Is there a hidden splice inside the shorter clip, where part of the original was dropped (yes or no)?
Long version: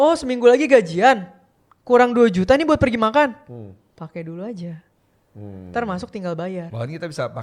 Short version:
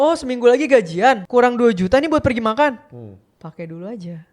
yes